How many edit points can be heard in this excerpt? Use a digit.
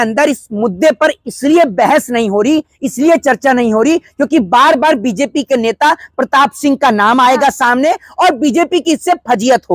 0